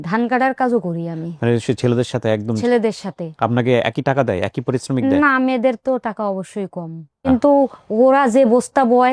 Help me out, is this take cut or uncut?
uncut